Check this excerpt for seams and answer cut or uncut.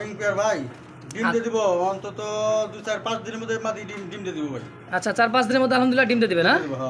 uncut